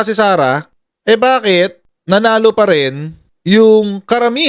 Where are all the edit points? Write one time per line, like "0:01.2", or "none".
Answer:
none